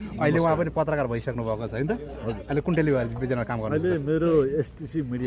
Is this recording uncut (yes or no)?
yes